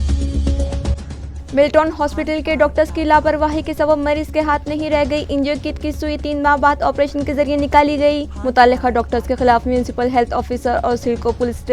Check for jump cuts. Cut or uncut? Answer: cut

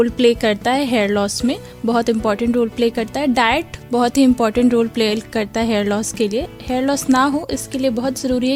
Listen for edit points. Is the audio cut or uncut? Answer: uncut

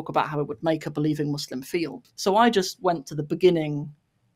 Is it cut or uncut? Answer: cut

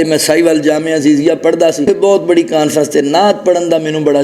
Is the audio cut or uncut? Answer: cut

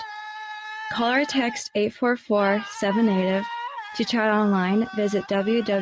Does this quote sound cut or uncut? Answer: uncut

